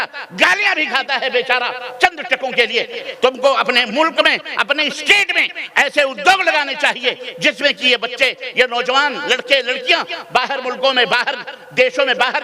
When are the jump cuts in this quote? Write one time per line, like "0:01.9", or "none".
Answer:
0:03.0